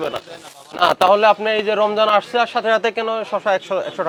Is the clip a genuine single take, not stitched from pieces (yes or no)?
yes